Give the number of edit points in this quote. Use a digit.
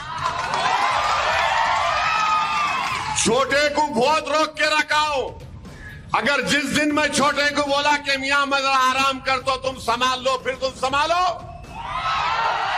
1